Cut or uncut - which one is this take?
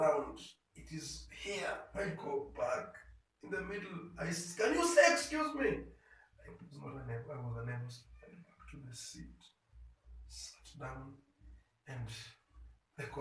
uncut